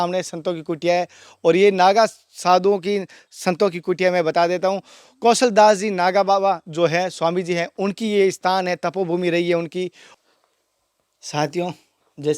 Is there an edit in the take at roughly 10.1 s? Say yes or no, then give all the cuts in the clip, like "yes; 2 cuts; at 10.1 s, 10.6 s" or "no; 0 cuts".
yes; 1 cut; at 10.1 s